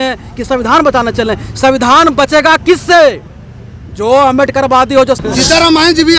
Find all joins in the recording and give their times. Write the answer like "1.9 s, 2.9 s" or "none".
5.2 s